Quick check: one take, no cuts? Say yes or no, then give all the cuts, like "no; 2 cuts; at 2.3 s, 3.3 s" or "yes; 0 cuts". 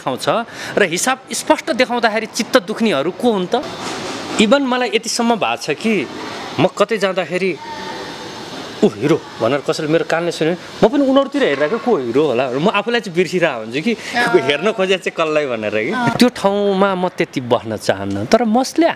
no; 2 cuts; at 3.8 s, 16.1 s